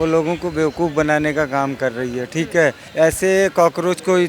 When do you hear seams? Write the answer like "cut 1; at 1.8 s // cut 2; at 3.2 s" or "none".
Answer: cut 1; at 2.8 s